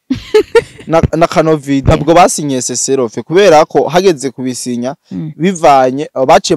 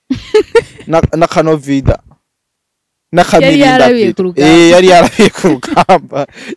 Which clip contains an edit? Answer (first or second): first